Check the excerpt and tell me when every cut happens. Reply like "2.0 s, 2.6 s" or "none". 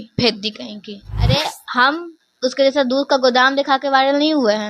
1.1 s